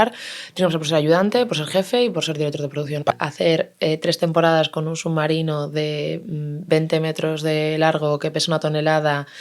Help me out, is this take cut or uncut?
cut